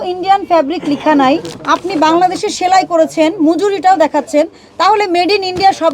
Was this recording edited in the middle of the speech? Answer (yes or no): no